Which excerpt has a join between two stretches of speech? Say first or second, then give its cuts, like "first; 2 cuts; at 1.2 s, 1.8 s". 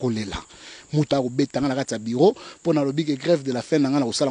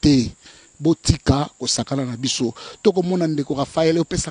first; 1 cut; at 1.1 s